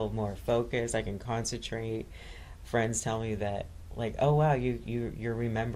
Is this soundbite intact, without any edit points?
yes; 0 cuts

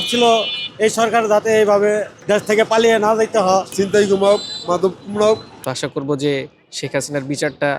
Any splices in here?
yes; 3 cuts; at 2.1 s, 3.7 s, 5.6 s

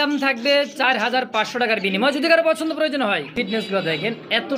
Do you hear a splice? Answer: yes; 1 cut; at 3.3 s

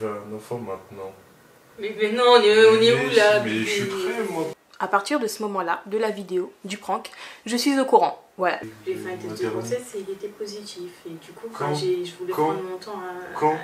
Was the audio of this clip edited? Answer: yes; 2 cuts; at 4.6 s, 8.7 s

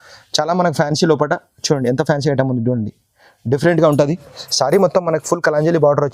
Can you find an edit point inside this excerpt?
no; 0 cuts

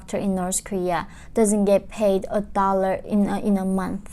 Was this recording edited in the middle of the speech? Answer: no; 0 cuts

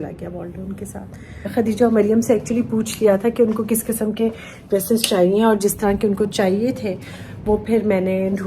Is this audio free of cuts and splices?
no; 1 cut; at 1.4 s

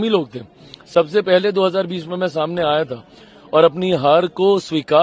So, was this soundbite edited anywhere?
no; 0 cuts

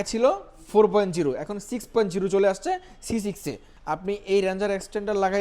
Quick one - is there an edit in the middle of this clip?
yes; 1 cut; at 3.7 s

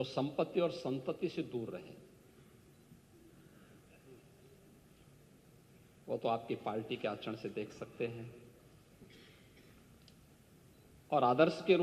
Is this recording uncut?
yes; 0 cuts

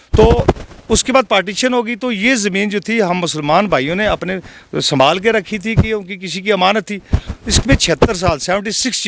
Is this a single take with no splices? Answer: yes; 0 cuts

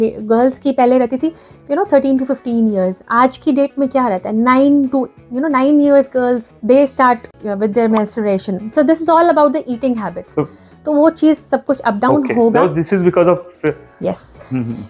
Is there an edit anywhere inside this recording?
no; 0 cuts

